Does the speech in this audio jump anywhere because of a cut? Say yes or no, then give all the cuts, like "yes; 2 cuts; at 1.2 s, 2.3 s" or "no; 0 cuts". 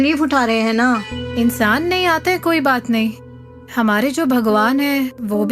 yes; 1 cut; at 1.1 s